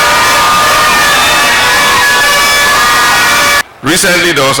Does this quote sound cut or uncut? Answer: cut